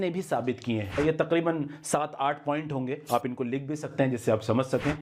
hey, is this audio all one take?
no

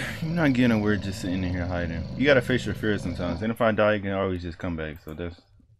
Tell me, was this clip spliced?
no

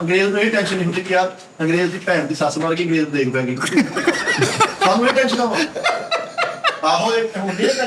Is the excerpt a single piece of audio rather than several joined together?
yes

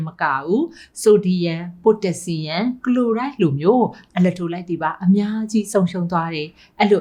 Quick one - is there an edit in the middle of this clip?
no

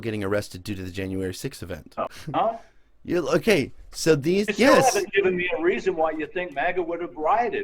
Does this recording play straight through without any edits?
no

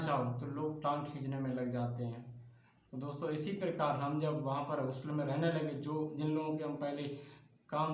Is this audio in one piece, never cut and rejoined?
yes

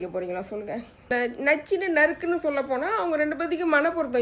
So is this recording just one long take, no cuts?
no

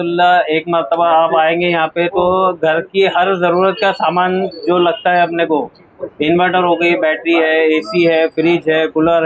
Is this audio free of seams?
yes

